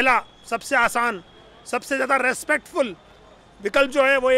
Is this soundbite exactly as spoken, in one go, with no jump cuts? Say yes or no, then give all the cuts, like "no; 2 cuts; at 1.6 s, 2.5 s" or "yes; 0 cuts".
yes; 0 cuts